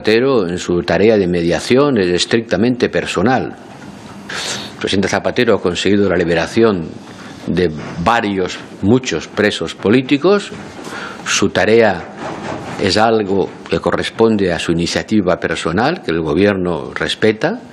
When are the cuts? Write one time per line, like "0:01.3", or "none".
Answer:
none

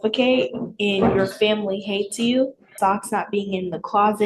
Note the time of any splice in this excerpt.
0:02.7

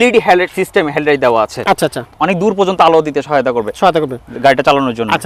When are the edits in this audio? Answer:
0:02.1

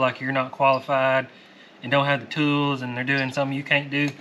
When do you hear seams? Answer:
none

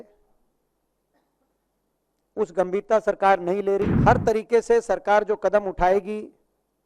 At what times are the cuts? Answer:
0:03.9

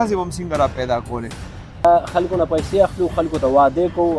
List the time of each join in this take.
0:01.8

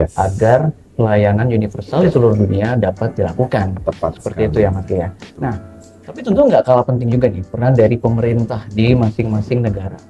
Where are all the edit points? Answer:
none

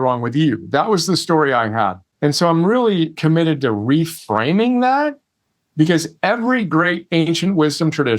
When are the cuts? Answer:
0:02.0
0:03.1

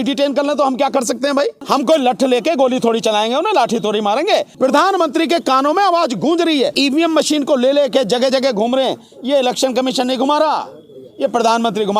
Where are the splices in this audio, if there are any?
0:01.6
0:04.5
0:06.7

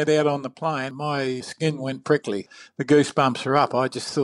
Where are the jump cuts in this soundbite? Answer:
0:01.2
0:02.5

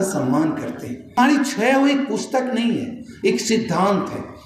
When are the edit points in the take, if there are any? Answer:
0:01.2

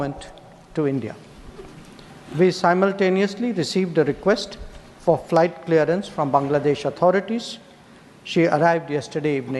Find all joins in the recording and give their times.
none

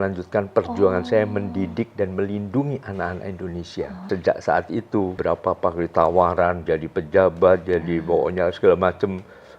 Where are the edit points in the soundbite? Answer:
0:04.0
0:05.1

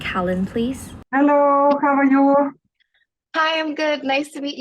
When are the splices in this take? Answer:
0:01.0

